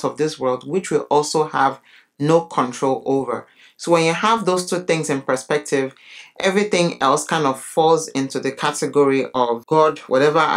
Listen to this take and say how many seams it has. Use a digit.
1